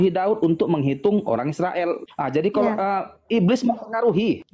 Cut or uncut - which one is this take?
uncut